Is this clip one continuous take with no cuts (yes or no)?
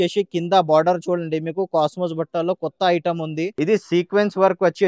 no